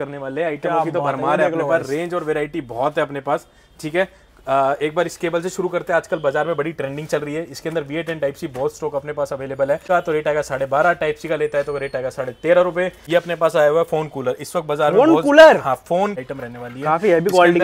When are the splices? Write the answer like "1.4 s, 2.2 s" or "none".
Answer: 9.8 s, 13.0 s, 16.2 s